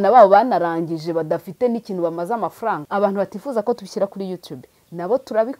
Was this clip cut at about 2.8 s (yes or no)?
yes